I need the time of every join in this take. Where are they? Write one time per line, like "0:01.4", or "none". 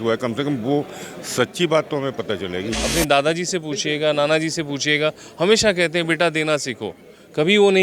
0:02.7